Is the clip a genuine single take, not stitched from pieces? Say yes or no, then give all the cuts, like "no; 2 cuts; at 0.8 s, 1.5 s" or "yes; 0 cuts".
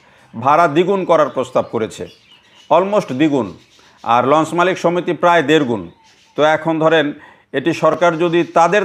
yes; 0 cuts